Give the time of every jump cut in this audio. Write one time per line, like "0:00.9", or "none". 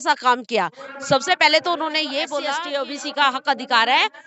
0:02.6